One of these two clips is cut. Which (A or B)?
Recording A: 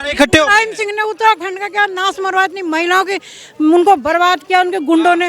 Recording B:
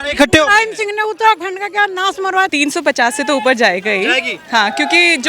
B